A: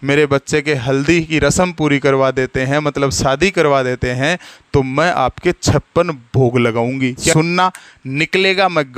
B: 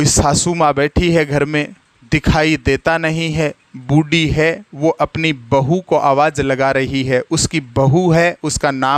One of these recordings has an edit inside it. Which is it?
A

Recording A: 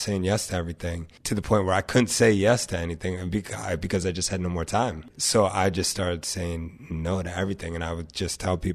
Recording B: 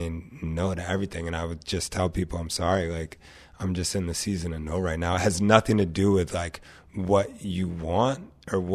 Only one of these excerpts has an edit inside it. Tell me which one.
A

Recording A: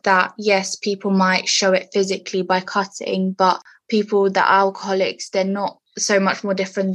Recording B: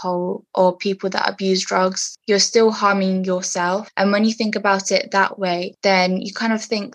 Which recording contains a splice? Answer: B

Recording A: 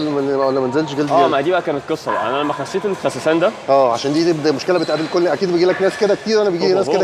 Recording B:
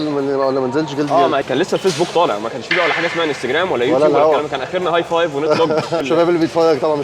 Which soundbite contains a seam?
B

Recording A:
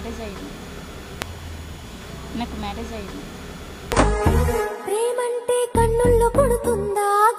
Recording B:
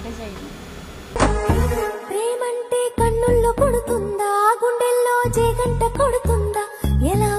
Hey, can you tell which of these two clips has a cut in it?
B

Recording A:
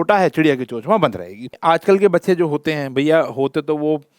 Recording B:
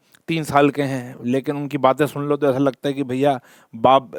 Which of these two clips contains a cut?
A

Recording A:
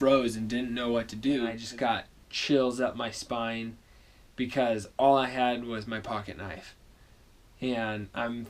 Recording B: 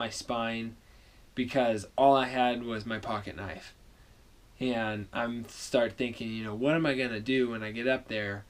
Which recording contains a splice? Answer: A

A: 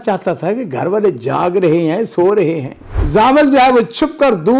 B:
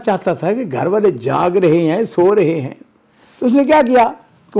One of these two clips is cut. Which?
A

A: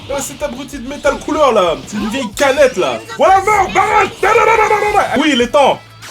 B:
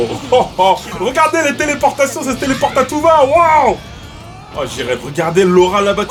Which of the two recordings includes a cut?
A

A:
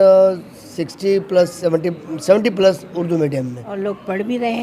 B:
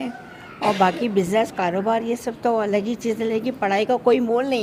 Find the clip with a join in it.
A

